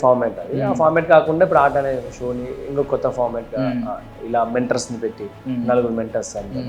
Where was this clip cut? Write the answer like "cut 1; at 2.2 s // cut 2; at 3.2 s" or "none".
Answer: none